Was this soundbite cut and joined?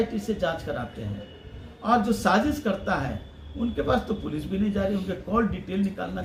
no; 0 cuts

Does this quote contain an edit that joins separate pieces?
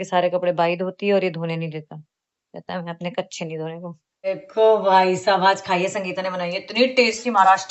yes; 1 cut; at 4.2 s

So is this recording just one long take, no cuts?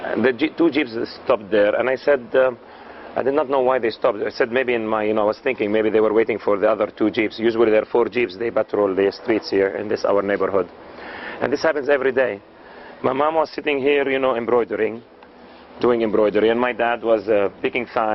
no; 1 cut; at 9.6 s

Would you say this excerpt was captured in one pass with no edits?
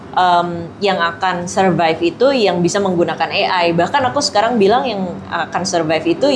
yes; 0 cuts

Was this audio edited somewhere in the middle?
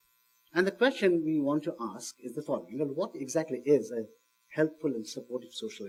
no; 0 cuts

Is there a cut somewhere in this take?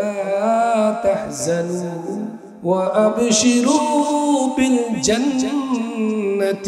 yes; 1 cut; at 2.4 s

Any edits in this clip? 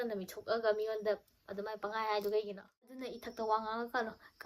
yes; 1 cut; at 3.1 s

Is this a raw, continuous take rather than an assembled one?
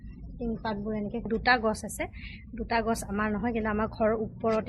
no; 1 cut; at 1.3 s

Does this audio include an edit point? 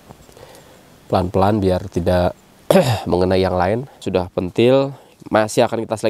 yes; 1 cut; at 4.0 s

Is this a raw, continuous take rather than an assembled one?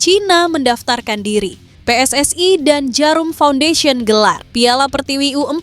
no; 1 cut; at 1.7 s

